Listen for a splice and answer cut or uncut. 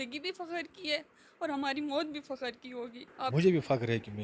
cut